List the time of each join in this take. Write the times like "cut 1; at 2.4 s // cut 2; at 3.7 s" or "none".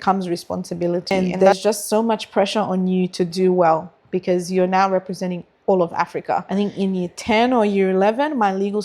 cut 1; at 1.1 s // cut 2; at 6.5 s